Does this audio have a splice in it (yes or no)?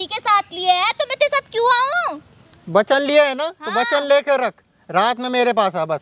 no